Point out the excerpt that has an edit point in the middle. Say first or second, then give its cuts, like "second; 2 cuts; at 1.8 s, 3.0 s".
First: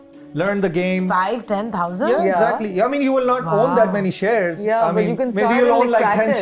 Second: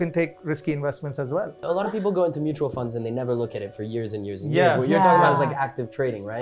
second; 1 cut; at 1.6 s